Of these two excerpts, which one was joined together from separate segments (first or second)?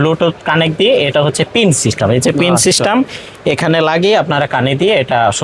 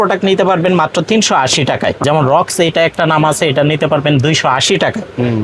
second